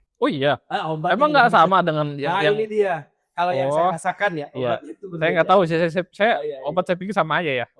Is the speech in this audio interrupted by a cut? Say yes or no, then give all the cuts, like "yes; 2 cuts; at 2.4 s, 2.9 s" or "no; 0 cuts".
no; 0 cuts